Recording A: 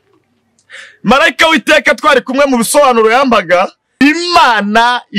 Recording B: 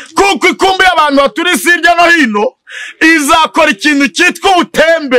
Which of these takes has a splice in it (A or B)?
A